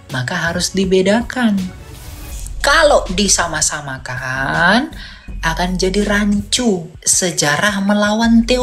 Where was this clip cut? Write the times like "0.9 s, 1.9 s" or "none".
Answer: 7.0 s